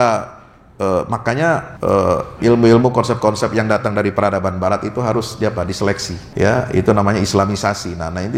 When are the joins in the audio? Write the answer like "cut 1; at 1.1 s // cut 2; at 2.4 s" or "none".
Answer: cut 1; at 1.7 s // cut 2; at 6.2 s